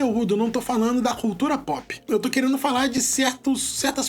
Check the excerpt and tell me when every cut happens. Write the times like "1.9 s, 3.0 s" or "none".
1.9 s

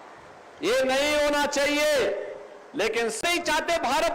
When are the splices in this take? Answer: 3.2 s

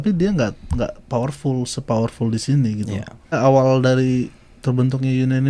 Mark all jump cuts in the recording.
3.3 s

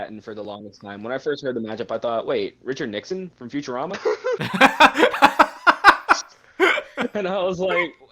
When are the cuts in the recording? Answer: 4.4 s

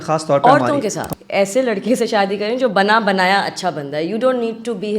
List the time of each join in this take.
1.0 s

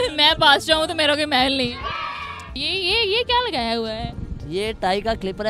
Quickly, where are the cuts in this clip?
2.5 s

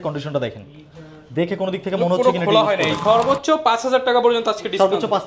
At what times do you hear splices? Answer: 3.0 s

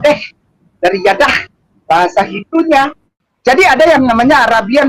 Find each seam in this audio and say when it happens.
3.3 s

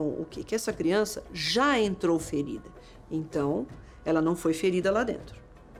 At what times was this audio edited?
none

